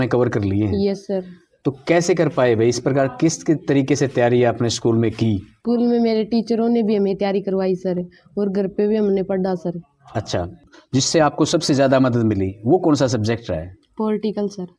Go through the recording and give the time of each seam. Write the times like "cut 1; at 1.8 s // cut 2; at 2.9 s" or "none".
cut 1; at 5.5 s

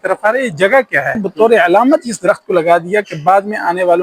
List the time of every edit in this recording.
cut 1; at 1.2 s

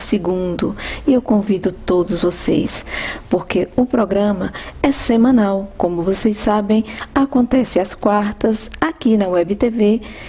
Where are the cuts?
cut 1; at 8.1 s

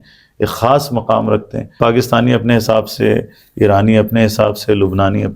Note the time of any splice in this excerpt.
cut 1; at 1.8 s

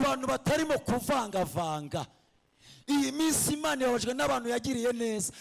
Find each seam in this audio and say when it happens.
none

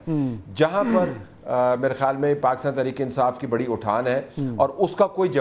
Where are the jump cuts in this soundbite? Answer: none

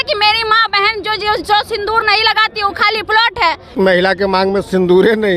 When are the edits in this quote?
cut 1; at 3.7 s

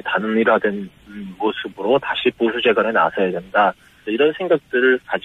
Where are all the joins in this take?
cut 1; at 1.7 s

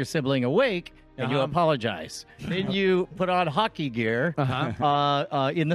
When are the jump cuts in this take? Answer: cut 1; at 2.5 s

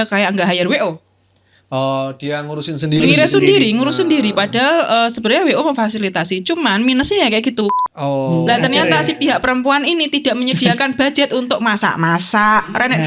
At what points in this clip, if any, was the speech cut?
cut 1; at 7.9 s

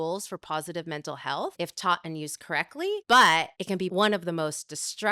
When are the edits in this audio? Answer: cut 1; at 1.5 s // cut 2; at 3.0 s // cut 3; at 3.8 s

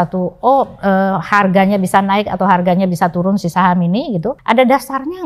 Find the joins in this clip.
cut 1; at 4.3 s

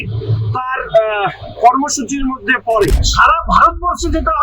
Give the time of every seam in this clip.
cut 1; at 3.0 s

